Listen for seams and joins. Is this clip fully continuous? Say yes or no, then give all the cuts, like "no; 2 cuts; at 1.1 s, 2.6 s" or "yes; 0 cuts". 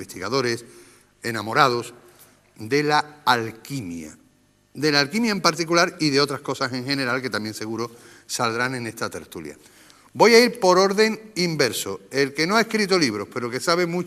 no; 1 cut; at 7.6 s